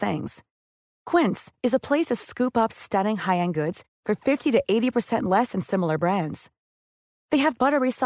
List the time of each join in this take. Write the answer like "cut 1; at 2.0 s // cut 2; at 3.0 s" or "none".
none